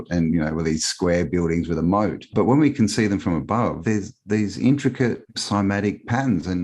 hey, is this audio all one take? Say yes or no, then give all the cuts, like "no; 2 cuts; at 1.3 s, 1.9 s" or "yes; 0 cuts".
no; 3 cuts; at 2.3 s, 3.8 s, 5.3 s